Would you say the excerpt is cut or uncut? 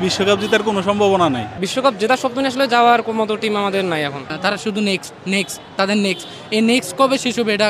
cut